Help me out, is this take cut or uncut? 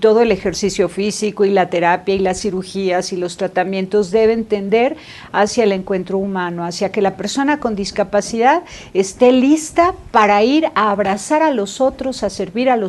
uncut